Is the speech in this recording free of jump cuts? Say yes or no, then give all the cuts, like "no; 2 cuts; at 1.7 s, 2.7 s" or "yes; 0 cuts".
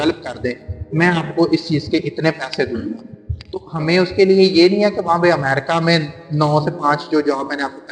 yes; 0 cuts